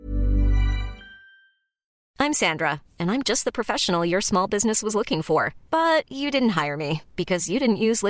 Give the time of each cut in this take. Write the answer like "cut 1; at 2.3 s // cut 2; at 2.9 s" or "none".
cut 1; at 2.0 s